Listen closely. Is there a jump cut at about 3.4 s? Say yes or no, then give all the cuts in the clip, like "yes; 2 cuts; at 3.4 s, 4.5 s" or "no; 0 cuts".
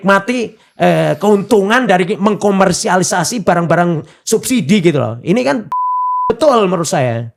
no; 0 cuts